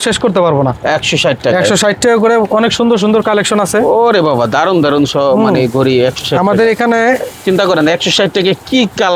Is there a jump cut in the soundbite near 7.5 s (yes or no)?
no